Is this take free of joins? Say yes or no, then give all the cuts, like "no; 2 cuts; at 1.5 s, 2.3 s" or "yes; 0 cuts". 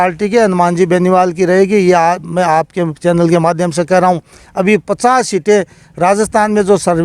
yes; 0 cuts